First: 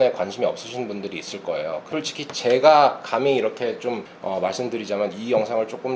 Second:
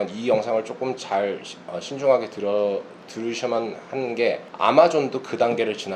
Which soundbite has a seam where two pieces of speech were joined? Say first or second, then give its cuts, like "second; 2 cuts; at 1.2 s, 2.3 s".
first; 2 cuts; at 1.8 s, 4.1 s